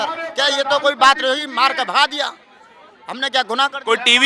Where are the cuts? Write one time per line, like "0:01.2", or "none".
none